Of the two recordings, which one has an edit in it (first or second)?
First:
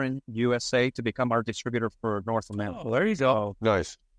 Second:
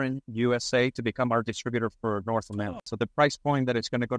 second